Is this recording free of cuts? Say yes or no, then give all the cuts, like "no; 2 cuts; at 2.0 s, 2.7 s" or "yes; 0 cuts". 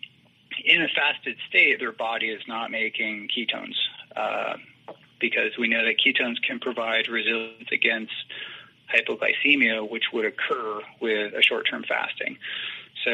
yes; 0 cuts